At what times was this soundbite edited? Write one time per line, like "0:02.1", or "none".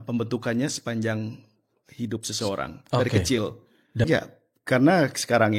0:04.0